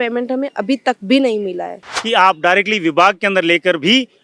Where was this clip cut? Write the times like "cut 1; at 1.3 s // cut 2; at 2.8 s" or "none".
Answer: cut 1; at 1.9 s

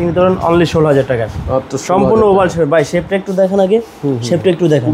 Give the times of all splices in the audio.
none

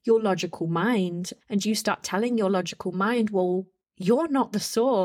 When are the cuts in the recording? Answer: none

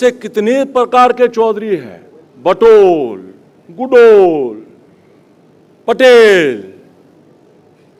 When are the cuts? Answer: none

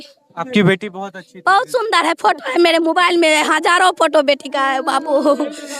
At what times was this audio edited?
none

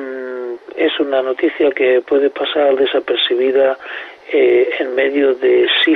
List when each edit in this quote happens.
cut 1; at 4.2 s

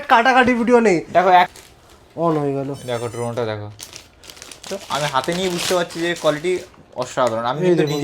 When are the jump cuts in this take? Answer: cut 1; at 1.5 s // cut 2; at 4.6 s

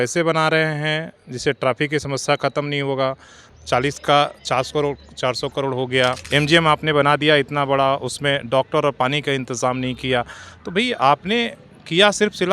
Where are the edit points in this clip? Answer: cut 1; at 3.5 s // cut 2; at 6.2 s

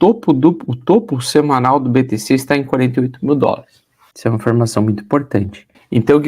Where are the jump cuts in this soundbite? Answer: cut 1; at 3.8 s

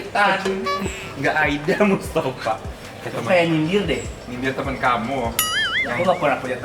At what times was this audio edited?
none

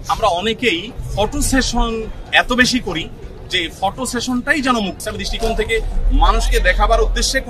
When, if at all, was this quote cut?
cut 1; at 1.0 s // cut 2; at 5.0 s

